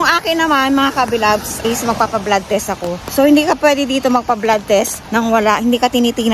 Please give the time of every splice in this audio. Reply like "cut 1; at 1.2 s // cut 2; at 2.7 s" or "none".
cut 1; at 1.5 s // cut 2; at 3.0 s // cut 3; at 5.0 s